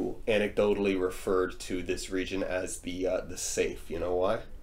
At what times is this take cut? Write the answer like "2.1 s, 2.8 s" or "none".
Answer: none